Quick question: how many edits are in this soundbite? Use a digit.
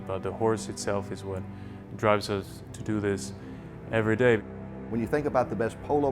1